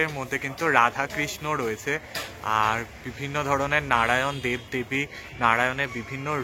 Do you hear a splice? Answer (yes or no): no